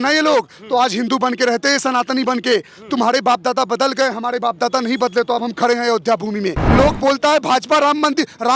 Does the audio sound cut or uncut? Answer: cut